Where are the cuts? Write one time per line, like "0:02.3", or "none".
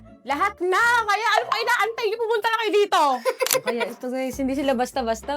0:03.7